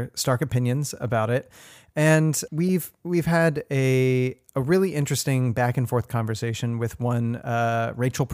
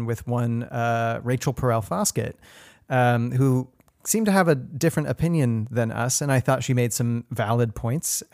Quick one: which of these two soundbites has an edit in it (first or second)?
first